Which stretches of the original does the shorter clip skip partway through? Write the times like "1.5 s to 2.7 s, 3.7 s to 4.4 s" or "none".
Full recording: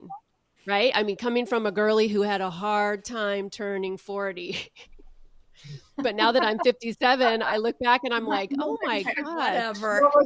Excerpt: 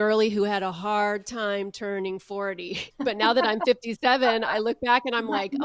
4.6 s to 5.8 s